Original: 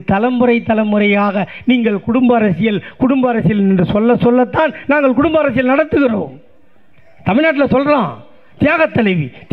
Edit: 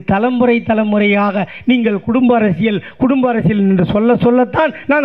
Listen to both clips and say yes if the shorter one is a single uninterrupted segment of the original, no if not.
yes